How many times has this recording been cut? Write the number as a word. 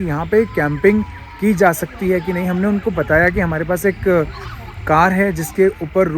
zero